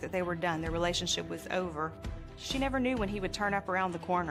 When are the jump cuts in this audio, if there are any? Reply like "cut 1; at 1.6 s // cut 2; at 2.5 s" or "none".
none